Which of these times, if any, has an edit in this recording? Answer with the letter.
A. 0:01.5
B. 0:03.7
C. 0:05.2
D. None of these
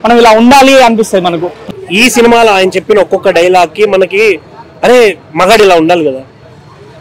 A